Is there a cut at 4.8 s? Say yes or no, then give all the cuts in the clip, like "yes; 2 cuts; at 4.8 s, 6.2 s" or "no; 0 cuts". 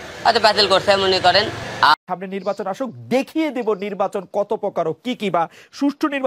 no; 1 cut; at 1.9 s